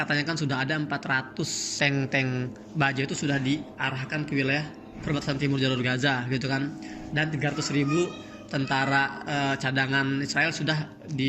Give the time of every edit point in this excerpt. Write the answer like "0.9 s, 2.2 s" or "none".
1.6 s